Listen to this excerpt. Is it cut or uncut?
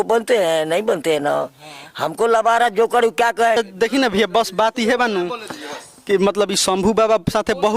cut